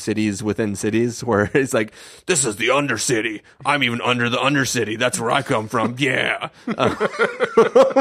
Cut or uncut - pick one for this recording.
uncut